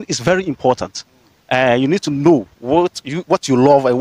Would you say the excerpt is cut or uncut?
uncut